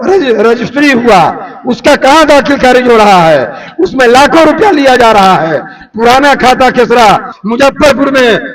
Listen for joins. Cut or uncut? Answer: cut